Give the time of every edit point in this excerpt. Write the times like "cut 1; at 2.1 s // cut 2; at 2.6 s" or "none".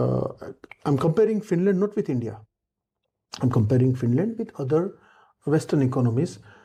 none

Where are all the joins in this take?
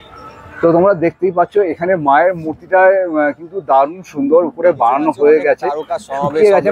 none

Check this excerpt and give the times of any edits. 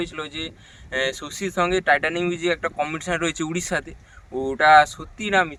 none

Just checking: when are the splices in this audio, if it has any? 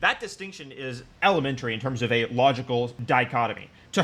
none

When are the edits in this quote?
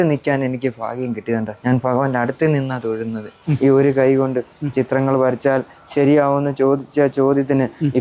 cut 1; at 1.5 s // cut 2; at 3.4 s

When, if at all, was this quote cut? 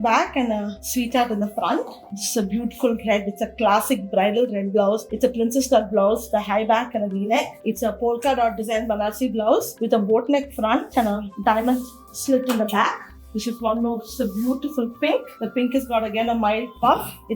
none

